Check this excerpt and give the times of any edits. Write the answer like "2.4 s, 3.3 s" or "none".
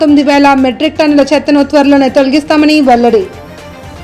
none